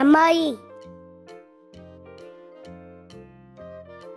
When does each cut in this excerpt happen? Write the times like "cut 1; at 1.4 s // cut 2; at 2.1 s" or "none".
cut 1; at 1.1 s